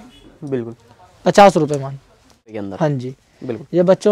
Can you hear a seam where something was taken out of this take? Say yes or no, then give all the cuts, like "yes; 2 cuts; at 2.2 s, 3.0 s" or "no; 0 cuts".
yes; 1 cut; at 2.6 s